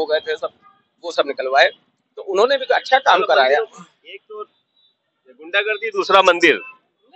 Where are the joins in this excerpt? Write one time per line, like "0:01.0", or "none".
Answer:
none